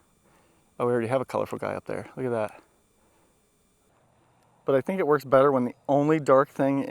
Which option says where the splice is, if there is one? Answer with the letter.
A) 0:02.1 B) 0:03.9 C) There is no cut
B